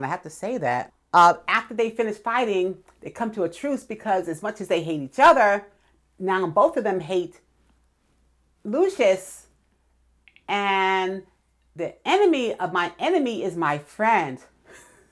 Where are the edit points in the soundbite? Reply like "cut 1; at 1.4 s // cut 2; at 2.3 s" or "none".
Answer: none

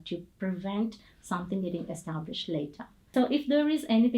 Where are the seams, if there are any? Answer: cut 1; at 3.1 s

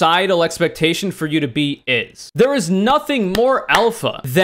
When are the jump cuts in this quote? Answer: cut 1; at 2.2 s

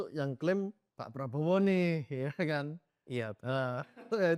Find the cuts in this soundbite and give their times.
none

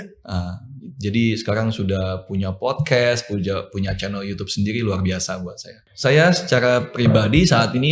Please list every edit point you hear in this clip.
cut 1; at 5.8 s

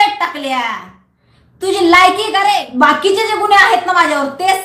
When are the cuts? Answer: cut 1; at 2.6 s

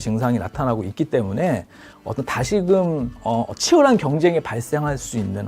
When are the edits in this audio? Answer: cut 1; at 1.9 s

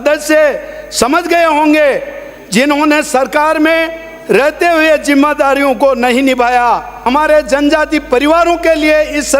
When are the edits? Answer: cut 1; at 7.1 s

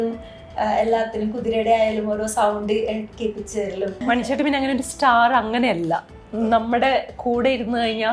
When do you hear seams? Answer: cut 1; at 4.0 s

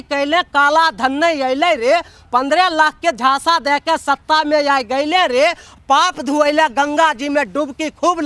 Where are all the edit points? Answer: none

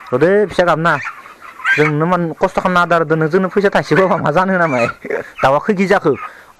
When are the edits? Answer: cut 1; at 5.3 s

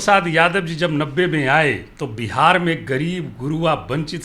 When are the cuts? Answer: cut 1; at 1.9 s

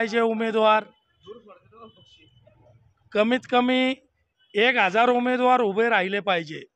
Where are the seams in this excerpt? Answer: none

